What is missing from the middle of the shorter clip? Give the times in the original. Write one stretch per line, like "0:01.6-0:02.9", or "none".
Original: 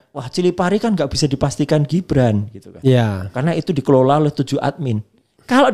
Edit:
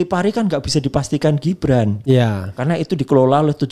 0:02.4-0:02.7